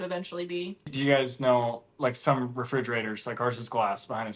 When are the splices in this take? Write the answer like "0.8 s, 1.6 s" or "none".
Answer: 0.9 s